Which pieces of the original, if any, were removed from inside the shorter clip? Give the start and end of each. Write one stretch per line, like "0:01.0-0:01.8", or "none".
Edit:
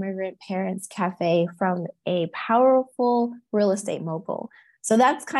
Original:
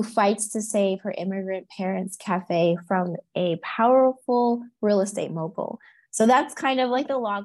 none